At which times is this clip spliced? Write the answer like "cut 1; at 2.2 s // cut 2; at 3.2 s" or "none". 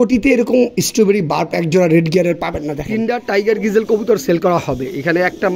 cut 1; at 2.8 s